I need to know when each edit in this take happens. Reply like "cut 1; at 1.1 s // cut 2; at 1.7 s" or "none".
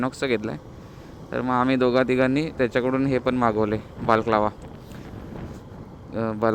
none